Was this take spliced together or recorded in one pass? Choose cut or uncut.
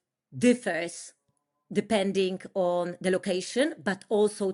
uncut